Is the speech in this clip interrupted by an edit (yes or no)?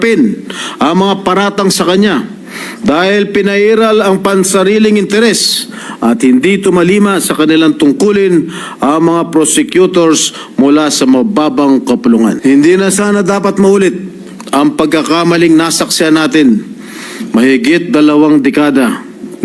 yes